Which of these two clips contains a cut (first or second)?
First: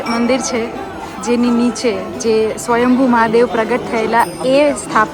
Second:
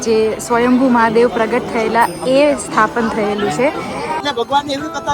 second